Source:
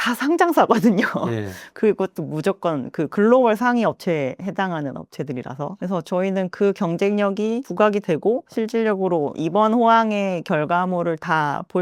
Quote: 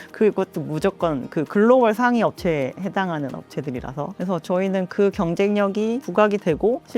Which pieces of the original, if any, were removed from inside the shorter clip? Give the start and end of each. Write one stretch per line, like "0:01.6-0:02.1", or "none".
none

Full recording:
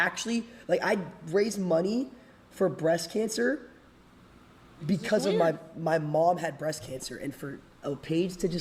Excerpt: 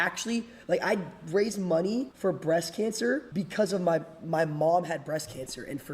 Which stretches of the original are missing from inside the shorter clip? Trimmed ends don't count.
0:02.1-0:02.5
0:03.6-0:04.8

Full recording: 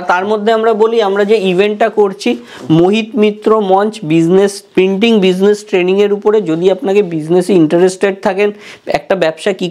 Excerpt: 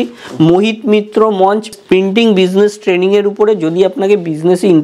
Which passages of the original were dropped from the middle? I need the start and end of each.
0:04.0-0:04.6

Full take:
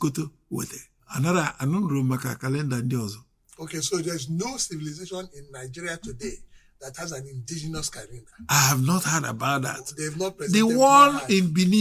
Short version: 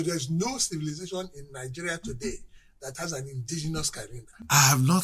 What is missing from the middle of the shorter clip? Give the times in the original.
none

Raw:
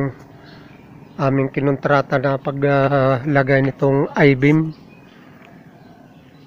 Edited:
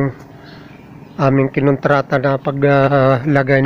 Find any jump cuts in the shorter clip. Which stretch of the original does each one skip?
none

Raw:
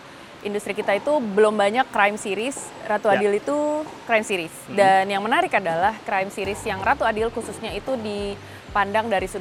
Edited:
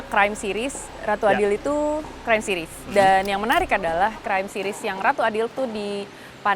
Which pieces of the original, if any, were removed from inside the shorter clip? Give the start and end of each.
0:07.3-0:07.8

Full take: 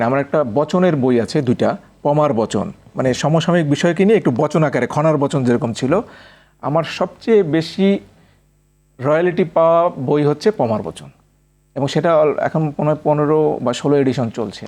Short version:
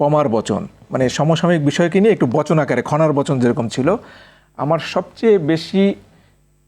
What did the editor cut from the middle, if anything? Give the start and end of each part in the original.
none

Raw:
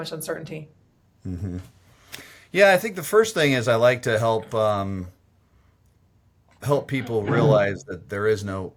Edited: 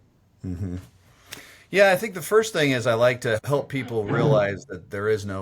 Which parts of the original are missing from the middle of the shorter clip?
0:04.2-0:06.6

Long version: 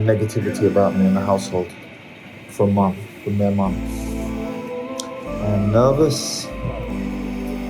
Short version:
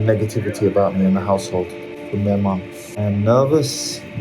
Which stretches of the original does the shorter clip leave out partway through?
0:02.0-0:03.1
0:03.9-0:05.3

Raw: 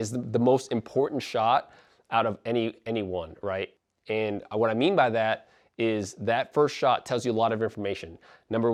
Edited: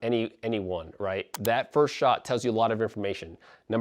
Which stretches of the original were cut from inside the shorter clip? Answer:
0:03.8-0:06.1

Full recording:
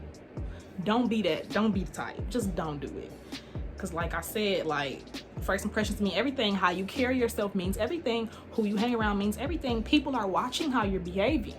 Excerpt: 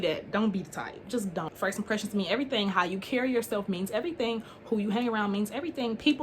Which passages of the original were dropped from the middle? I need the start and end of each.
0:02.7-0:05.4

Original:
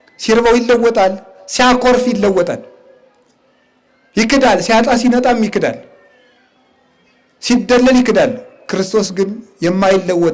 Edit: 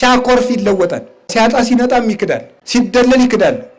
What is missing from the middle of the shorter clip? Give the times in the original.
0:02.9-0:04.6
0:05.9-0:07.3

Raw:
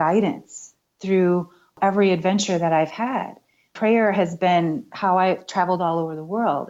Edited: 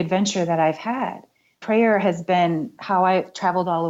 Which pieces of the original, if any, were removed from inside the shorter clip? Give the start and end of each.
none

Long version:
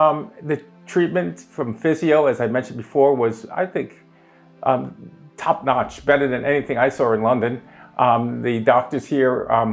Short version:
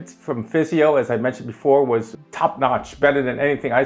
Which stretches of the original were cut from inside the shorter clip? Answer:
0:03.4-0:05.2

